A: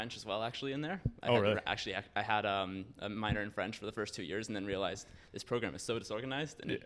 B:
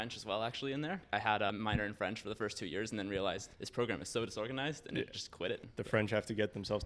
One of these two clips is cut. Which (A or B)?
B